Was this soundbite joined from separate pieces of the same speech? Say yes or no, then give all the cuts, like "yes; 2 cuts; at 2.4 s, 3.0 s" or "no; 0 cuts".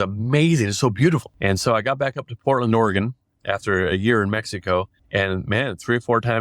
yes; 2 cuts; at 1.3 s, 5.0 s